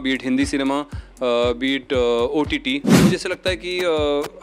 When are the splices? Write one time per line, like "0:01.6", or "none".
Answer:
0:02.9